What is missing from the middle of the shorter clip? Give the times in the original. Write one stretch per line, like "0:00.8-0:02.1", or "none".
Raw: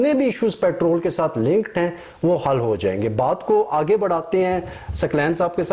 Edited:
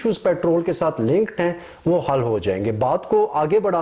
none